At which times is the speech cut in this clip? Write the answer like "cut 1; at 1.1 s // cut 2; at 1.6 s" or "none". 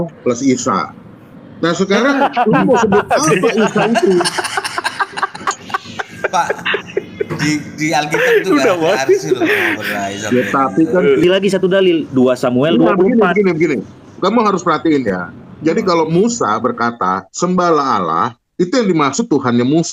cut 1; at 11.2 s